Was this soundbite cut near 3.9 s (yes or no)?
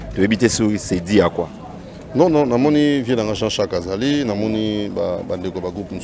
no